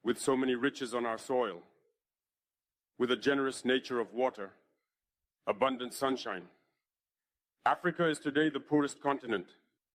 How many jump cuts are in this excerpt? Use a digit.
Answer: 0